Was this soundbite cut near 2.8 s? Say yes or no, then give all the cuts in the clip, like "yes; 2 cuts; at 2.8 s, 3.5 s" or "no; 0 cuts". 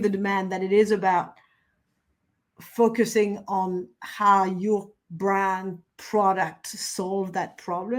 no; 0 cuts